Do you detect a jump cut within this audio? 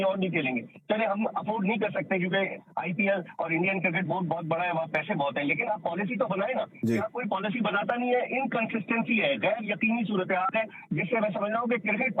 no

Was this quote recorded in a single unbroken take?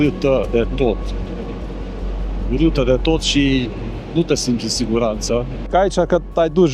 no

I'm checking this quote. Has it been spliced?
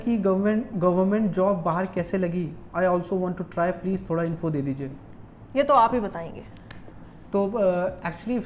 no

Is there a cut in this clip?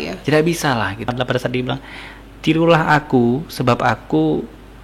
yes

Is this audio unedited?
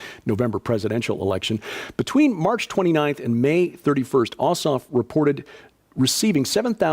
no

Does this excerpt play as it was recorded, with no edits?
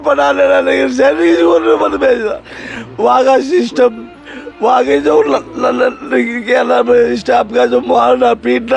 yes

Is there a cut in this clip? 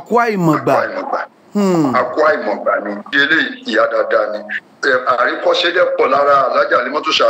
yes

